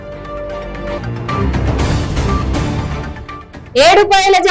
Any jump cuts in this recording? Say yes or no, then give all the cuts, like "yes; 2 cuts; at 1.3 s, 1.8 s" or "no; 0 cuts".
yes; 1 cut; at 1.0 s